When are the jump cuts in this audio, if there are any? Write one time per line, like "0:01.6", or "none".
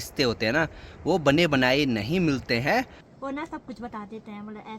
0:03.0

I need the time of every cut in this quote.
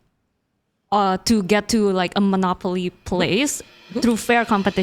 none

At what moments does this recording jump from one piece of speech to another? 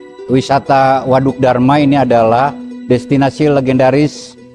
0:02.7

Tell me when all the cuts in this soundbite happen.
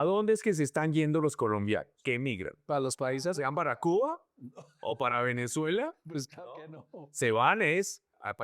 0:01.9

